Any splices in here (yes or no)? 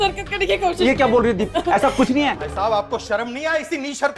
yes